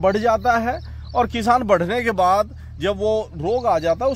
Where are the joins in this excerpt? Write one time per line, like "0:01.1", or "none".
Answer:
none